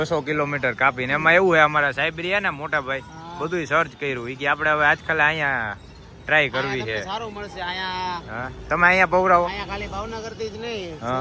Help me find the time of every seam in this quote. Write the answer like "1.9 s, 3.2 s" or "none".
none